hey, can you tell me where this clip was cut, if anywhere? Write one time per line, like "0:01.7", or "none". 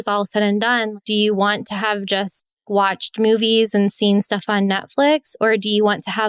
0:00.9
0:02.7